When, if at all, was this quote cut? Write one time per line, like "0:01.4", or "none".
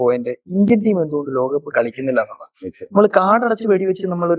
none